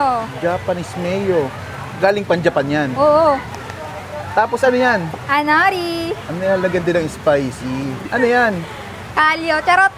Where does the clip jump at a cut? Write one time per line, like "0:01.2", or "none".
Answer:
0:03.5
0:06.2
0:08.0
0:09.0